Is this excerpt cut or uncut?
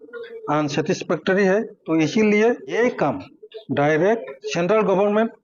cut